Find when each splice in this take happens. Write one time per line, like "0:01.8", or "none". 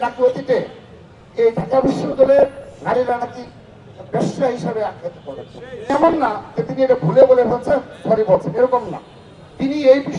0:05.8